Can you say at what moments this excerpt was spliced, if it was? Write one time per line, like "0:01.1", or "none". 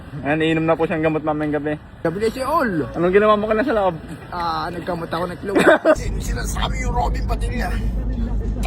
0:02.0